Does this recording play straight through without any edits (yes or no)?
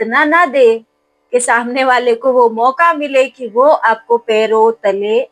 yes